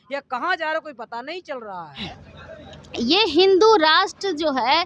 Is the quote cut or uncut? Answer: cut